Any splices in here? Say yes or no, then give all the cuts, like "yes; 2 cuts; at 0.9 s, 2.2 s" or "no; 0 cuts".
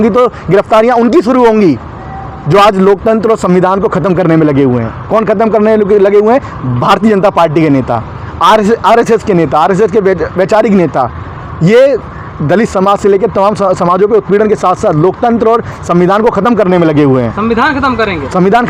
no; 0 cuts